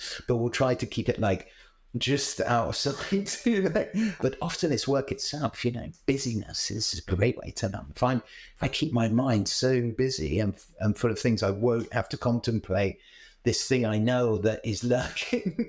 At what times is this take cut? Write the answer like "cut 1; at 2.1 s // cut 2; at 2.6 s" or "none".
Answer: cut 1; at 4.0 s